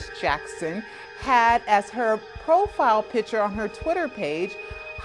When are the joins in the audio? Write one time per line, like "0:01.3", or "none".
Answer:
0:03.1